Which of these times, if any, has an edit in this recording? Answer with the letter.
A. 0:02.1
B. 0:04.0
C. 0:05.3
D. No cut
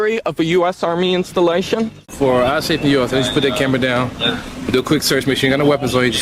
A